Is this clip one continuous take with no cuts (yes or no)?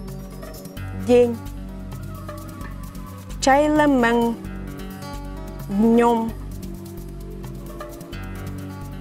no